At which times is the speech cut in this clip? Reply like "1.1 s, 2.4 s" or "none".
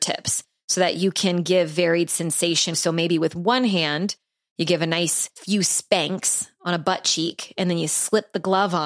2.8 s, 5.3 s